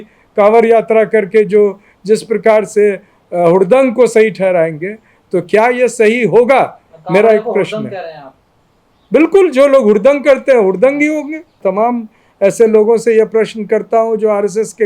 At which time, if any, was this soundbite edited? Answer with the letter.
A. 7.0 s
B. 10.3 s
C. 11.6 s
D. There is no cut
C